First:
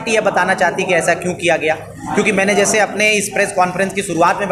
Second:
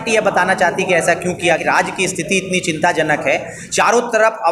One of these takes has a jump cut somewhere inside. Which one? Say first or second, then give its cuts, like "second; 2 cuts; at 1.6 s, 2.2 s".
second; 1 cut; at 1.6 s